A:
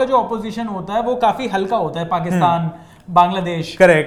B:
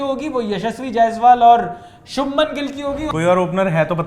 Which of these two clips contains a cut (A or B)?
B